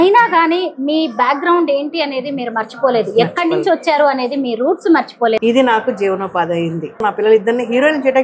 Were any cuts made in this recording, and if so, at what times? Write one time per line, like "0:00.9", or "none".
0:05.4
0:07.0